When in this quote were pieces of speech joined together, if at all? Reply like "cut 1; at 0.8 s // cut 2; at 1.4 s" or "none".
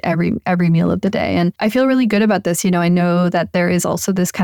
cut 1; at 1.6 s